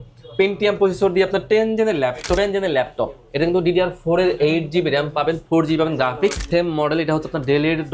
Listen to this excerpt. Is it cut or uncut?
cut